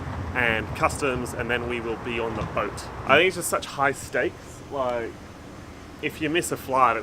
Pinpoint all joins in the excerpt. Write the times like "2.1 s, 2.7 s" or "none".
3.0 s